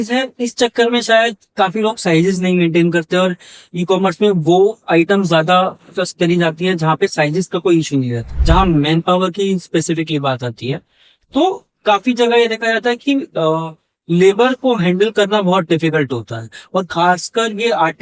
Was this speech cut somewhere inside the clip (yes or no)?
yes